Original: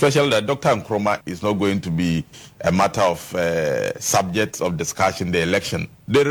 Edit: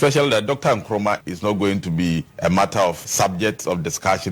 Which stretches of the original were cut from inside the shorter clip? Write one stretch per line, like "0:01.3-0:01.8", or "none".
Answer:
0:02.3-0:02.5
0:03.3-0:04.0